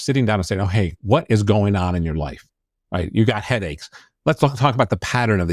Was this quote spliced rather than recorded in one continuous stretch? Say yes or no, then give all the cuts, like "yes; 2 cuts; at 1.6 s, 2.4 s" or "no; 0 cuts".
no; 0 cuts